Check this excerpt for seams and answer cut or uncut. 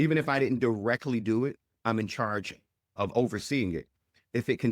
cut